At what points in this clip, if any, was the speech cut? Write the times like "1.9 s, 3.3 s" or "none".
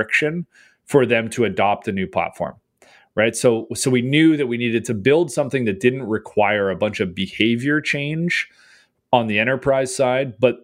none